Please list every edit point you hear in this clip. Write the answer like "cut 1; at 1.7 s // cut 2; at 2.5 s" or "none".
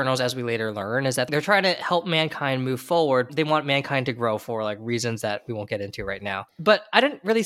none